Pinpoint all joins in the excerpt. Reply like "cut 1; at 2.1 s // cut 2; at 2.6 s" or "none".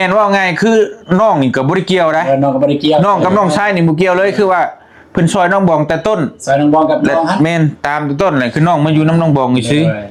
none